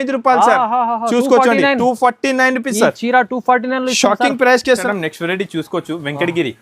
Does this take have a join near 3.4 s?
no; 1 cut; at 4.8 s

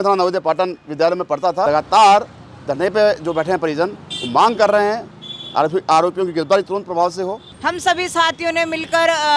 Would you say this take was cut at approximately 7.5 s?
yes; 2 cuts; at 1.6 s, 7.5 s

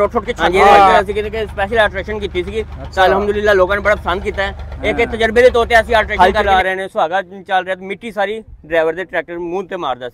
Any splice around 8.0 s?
no; 2 cuts; at 1.0 s, 6.1 s

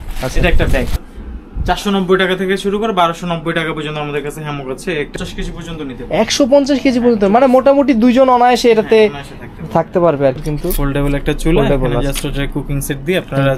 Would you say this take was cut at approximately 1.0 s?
yes; 3 cuts; at 1.0 s, 5.1 s, 10.5 s

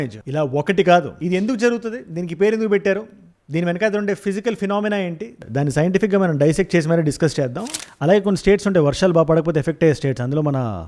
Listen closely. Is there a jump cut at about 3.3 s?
no; 1 cut; at 7.8 s

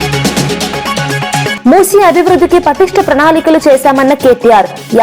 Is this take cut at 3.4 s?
no; 1 cut; at 1.6 s

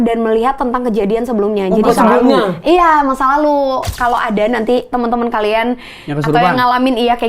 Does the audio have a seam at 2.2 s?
no; 1 cut; at 3.9 s

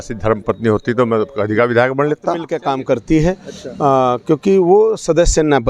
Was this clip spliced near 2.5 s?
yes; 1 cut; at 2.5 s

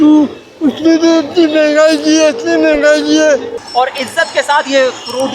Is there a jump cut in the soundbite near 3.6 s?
yes; 1 cut; at 3.6 s

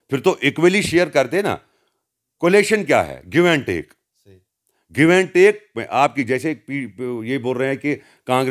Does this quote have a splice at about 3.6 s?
no; 0 cuts

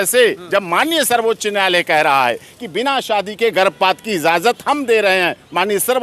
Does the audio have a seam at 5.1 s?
no; 0 cuts

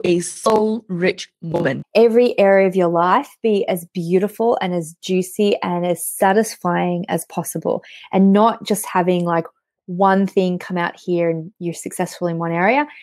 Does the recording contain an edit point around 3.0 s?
no; 1 cut; at 1.8 s

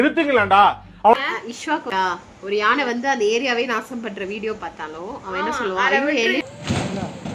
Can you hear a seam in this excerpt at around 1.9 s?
yes; 1 cut; at 1.9 s

